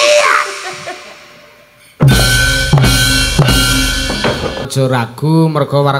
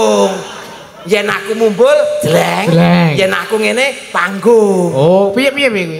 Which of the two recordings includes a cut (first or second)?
first